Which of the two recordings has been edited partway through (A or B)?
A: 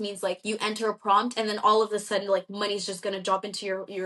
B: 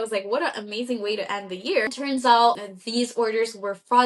B